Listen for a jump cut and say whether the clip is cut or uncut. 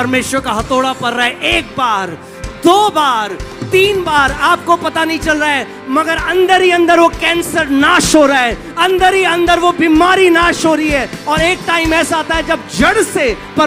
uncut